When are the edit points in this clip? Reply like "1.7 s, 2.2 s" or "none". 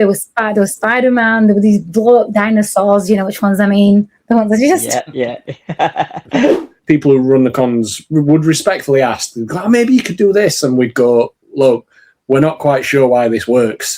6.7 s